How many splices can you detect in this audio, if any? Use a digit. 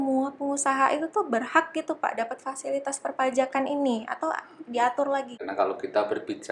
1